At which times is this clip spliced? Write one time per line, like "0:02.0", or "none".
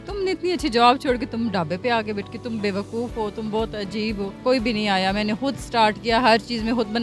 0:04.4